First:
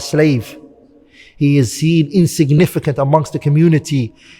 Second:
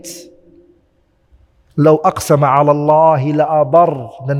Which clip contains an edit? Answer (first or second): first